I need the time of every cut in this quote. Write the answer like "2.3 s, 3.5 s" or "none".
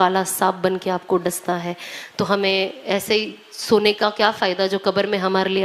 none